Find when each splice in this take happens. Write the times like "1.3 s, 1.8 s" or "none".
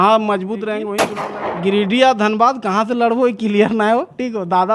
1.0 s